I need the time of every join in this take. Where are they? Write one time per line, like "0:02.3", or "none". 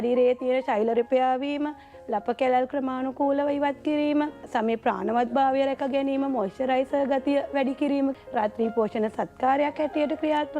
0:04.4
0:08.2

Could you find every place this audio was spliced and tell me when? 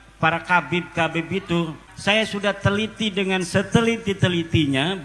0:01.9

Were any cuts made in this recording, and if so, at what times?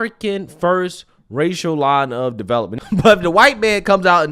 0:02.7

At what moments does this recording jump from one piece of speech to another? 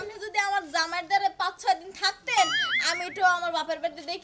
none

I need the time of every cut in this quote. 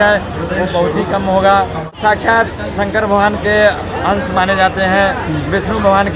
0:02.0

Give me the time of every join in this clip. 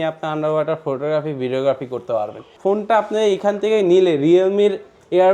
0:02.5

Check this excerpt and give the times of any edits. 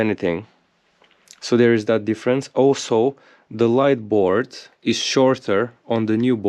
none

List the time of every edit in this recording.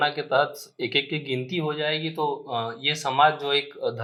none

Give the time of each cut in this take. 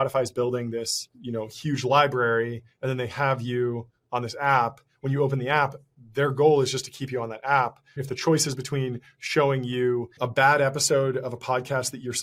0:01.1
0:08.0
0:10.1

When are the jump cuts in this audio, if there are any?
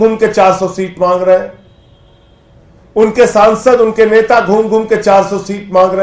none

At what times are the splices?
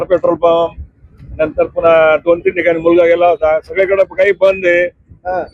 none

